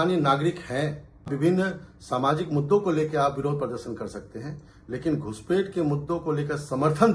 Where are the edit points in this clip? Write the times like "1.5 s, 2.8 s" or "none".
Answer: 1.3 s